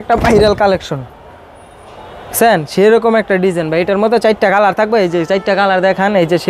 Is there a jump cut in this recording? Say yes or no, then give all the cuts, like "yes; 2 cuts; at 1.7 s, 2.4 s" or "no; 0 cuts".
no; 0 cuts